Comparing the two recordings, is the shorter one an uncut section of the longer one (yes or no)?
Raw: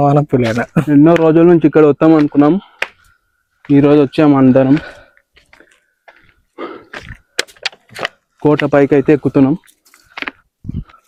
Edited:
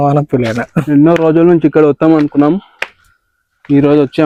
yes